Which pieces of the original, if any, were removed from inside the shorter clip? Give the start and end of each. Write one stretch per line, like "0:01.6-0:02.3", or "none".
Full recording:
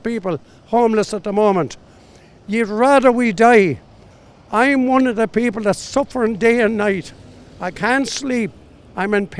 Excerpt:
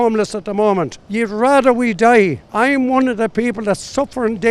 0:01.8-0:02.4
0:03.8-0:04.4